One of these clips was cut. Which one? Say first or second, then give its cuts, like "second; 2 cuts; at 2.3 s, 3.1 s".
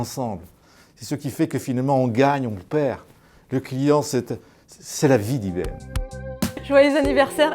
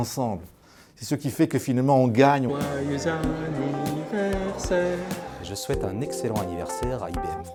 first; 1 cut; at 2.5 s